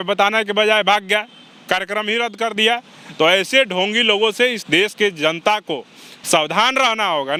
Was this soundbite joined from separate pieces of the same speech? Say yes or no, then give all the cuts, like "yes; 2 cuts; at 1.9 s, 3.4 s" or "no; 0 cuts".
no; 0 cuts